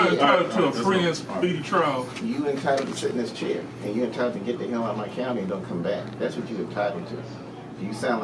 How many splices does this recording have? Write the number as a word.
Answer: zero